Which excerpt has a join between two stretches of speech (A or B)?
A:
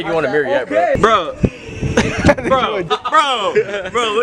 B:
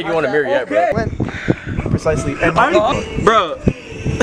A